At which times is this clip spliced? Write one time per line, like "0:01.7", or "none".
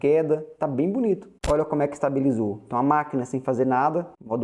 0:01.3